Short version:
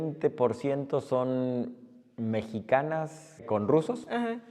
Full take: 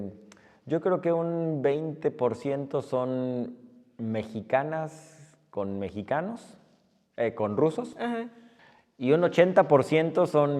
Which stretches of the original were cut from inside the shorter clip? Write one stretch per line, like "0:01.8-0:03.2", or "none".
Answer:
0:05.3-0:07.3